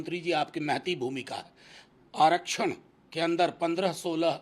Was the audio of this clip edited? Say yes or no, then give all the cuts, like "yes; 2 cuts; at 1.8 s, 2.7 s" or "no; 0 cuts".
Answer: no; 0 cuts